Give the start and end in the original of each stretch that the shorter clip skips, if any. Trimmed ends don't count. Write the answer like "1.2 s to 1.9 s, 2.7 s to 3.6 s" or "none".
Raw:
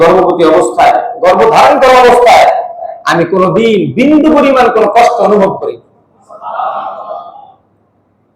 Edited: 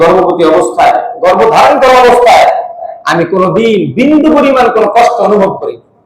none